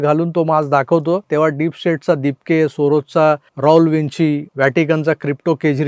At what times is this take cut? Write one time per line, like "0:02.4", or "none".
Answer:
0:01.2
0:03.5
0:04.5